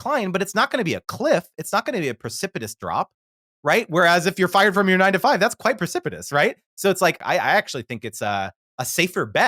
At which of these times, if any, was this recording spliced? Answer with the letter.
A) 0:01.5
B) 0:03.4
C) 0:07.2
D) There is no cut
C